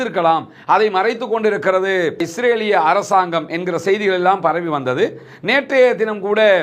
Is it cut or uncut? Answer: uncut